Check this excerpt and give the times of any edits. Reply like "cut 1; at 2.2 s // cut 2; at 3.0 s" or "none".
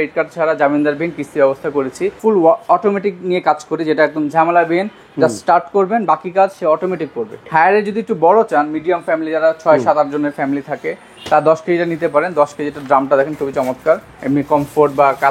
cut 1; at 2.2 s // cut 2; at 7.5 s // cut 3; at 14.1 s

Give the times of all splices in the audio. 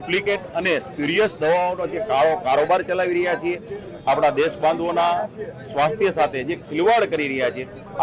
none

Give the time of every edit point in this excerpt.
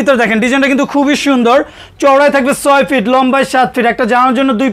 none

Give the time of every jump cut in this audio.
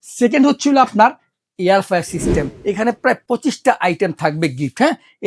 cut 1; at 2.6 s

